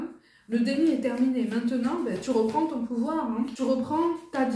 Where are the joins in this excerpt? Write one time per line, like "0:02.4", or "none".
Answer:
0:03.5